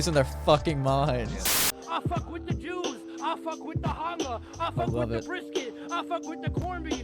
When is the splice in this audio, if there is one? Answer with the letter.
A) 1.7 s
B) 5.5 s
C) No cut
A